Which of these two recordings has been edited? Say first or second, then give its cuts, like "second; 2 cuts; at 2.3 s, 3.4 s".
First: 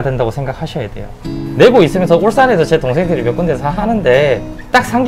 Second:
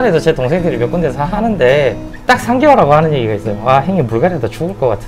first; 1 cut; at 1.4 s